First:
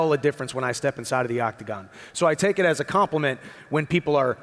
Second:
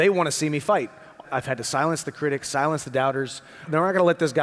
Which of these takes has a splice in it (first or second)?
second